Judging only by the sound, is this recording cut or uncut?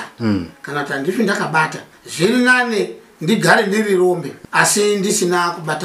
cut